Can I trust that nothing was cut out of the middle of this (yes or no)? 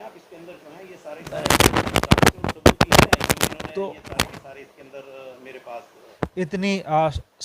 no